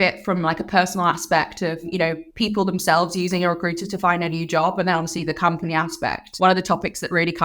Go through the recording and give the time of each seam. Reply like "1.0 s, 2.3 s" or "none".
1.9 s, 6.2 s

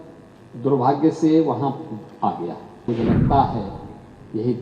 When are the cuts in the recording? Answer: 2.9 s

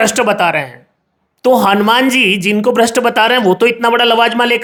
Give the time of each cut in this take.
none

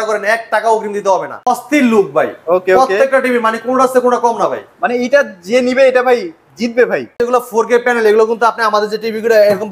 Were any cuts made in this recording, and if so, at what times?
1.5 s, 7.2 s

